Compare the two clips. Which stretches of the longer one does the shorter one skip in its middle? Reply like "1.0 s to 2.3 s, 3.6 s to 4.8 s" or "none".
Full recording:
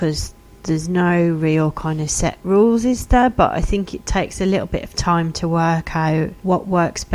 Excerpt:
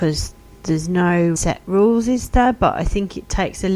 1.4 s to 2.1 s